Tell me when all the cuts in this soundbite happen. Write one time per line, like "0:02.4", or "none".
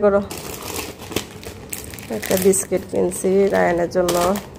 none